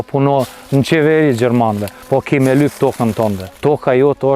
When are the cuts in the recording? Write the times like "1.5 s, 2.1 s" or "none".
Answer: 1.9 s, 3.5 s